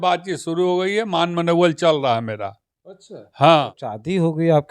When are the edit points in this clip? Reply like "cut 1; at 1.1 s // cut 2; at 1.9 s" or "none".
cut 1; at 3.5 s